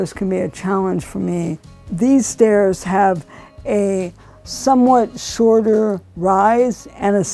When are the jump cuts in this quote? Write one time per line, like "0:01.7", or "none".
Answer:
none